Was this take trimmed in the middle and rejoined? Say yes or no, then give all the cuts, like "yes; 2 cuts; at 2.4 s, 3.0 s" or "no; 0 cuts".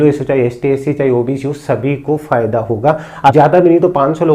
yes; 1 cut; at 3.3 s